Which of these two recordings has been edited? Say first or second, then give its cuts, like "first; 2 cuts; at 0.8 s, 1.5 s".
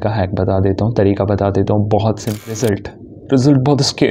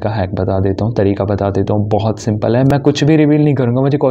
first; 1 cut; at 2.5 s